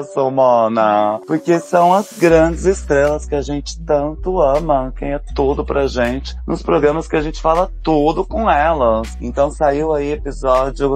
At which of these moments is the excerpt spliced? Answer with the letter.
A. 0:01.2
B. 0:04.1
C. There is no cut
A